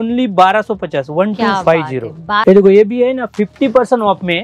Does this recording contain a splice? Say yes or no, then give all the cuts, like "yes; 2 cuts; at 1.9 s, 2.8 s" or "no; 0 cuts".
yes; 1 cut; at 2.4 s